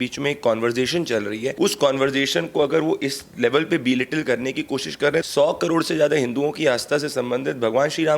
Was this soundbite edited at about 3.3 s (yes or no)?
no